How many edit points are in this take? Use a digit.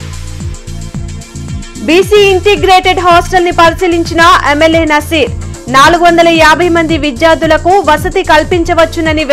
1